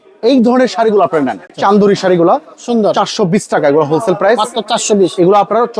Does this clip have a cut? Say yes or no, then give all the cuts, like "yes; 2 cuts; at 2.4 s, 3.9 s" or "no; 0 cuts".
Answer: yes; 1 cut; at 1.5 s